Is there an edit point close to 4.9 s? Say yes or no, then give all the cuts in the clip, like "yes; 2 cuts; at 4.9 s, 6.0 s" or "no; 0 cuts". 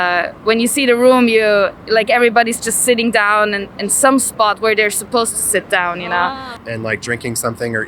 no; 1 cut; at 6.5 s